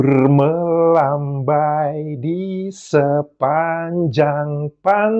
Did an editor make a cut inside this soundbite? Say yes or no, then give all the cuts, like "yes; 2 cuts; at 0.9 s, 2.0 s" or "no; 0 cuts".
no; 0 cuts